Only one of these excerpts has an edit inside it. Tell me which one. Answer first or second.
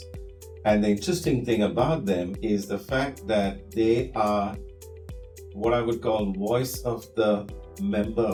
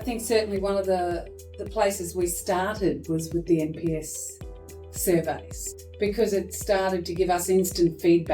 second